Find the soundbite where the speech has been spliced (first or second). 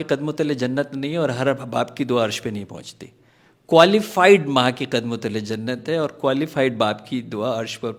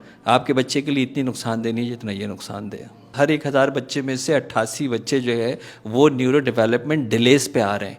second